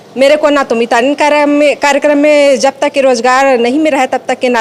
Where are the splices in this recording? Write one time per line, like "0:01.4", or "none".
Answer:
none